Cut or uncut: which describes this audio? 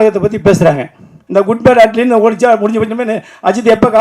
cut